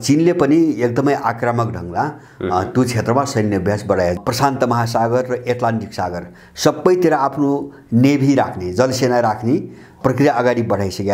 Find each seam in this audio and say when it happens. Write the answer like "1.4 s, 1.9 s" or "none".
4.2 s, 10.0 s